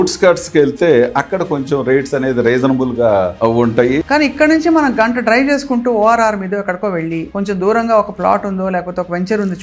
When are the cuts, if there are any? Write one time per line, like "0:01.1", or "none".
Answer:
0:04.0
0:07.3